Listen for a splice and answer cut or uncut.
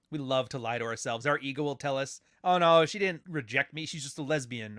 cut